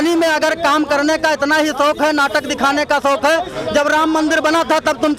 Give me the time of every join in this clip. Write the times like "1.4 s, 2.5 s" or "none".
none